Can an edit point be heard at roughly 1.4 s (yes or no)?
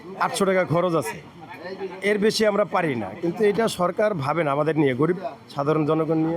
no